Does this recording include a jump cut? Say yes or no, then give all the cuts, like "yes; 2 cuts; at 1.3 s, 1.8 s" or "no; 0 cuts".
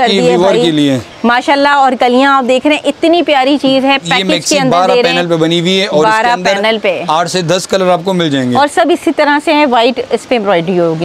no; 0 cuts